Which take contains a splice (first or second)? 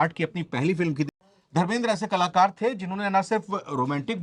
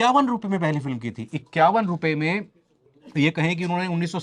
first